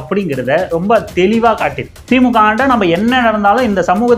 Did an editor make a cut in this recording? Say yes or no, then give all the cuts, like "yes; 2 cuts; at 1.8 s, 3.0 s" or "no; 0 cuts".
yes; 1 cut; at 2.0 s